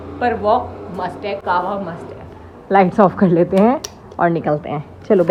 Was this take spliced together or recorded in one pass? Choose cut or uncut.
uncut